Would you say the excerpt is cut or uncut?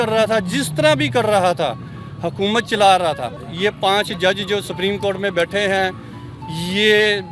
cut